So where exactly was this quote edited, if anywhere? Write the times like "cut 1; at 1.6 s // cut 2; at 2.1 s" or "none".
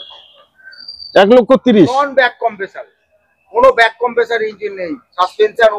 none